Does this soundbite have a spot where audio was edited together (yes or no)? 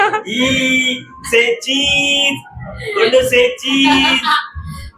no